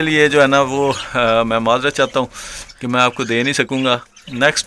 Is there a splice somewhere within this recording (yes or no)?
no